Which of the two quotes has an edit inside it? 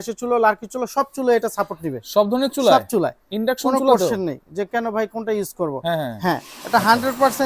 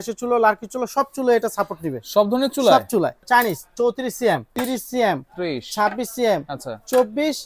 second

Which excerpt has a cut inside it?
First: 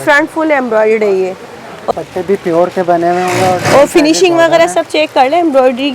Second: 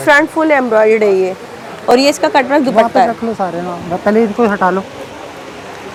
first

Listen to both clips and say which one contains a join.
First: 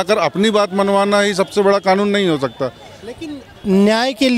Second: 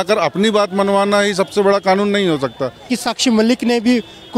second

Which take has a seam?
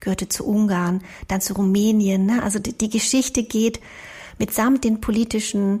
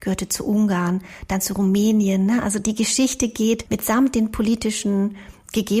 second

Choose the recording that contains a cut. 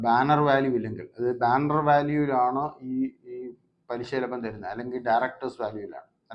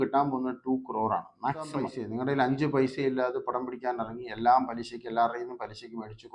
second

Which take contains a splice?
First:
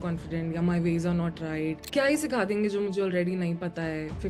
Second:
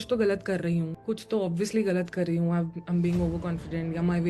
first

